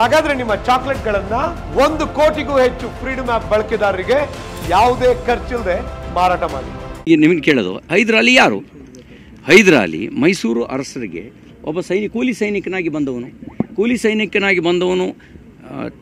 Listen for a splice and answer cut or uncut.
cut